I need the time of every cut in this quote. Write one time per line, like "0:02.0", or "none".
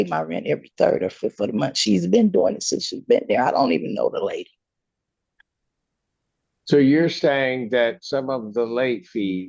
none